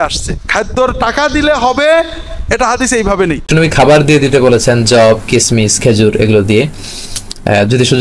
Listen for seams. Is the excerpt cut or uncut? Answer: cut